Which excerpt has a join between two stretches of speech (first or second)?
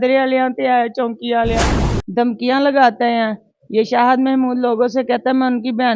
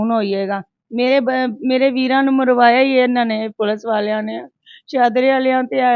first